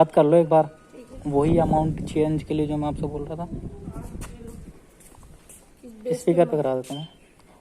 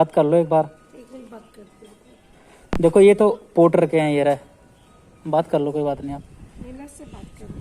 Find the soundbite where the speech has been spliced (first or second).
first